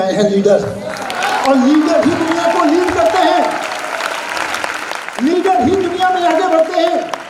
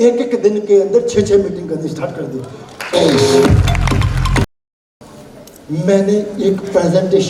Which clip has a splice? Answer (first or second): second